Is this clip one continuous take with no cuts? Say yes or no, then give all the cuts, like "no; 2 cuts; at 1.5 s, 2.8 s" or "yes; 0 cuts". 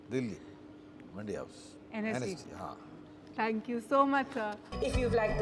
yes; 0 cuts